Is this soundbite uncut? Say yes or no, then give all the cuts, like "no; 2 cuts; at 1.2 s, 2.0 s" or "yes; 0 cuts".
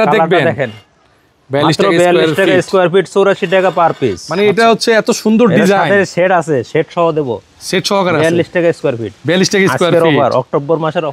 no; 1 cut; at 4.2 s